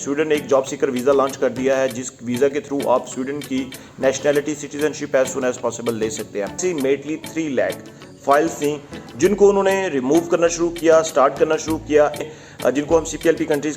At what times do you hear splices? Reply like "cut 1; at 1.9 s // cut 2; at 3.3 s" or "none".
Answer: cut 1; at 6.6 s // cut 2; at 12.3 s